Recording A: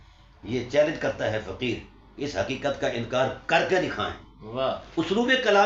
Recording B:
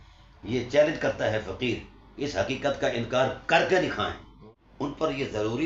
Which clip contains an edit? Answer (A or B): B